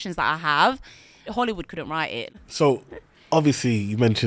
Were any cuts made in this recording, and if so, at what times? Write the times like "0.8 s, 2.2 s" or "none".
1.3 s, 2.3 s